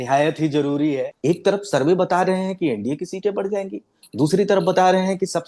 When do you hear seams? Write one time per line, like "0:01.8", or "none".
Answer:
0:01.1